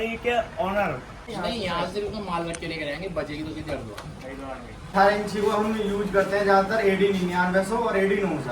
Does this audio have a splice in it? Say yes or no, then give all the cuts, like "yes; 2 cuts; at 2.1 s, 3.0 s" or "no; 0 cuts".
yes; 2 cuts; at 1.2 s, 4.9 s